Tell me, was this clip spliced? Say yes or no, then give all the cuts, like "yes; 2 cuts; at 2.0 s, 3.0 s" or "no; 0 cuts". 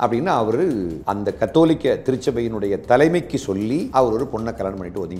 yes; 2 cuts; at 1.0 s, 3.9 s